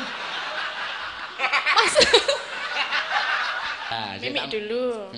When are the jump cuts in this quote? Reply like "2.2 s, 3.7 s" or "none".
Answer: 3.9 s